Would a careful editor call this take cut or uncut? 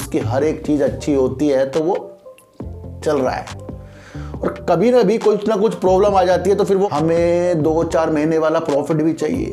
cut